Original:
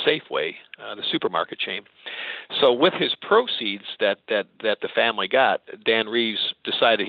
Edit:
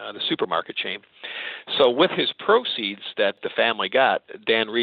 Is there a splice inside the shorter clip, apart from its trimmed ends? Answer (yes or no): yes